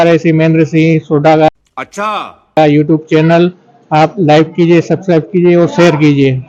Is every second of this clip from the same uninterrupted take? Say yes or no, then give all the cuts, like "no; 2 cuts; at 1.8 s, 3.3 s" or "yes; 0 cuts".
yes; 0 cuts